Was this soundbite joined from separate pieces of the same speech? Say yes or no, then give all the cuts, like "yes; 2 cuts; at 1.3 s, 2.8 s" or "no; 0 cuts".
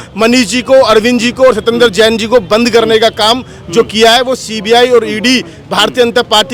no; 0 cuts